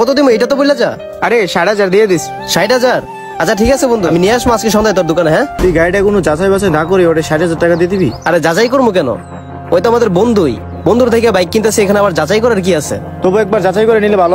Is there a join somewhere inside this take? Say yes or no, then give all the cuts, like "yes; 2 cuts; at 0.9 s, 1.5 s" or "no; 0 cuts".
yes; 1 cut; at 5.6 s